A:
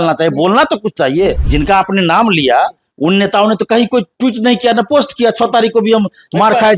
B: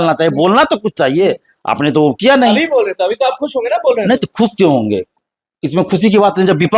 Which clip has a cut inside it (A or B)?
A